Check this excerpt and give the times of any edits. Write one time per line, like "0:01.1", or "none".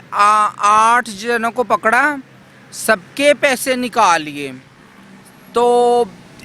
none